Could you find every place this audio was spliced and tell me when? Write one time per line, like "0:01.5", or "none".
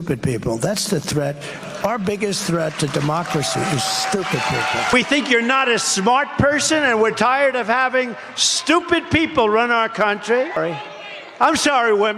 0:04.9
0:10.6

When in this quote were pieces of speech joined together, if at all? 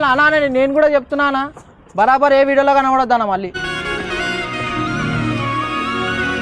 none

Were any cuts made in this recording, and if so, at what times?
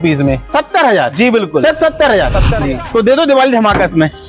0:02.5

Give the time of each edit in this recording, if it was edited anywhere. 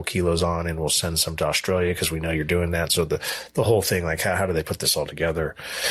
none

